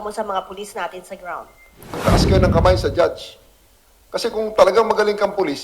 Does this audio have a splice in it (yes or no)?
yes